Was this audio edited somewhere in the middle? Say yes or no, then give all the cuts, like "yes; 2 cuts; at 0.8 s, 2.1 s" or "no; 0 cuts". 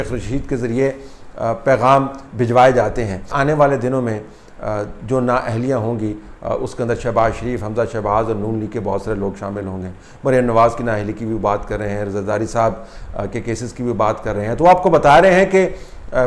yes; 1 cut; at 3.2 s